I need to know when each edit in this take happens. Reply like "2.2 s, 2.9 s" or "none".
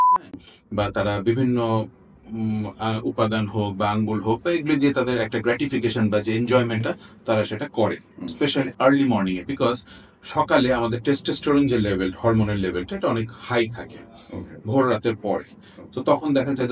8.3 s